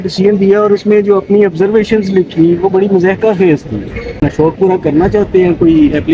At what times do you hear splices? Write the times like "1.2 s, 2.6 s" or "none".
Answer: 4.2 s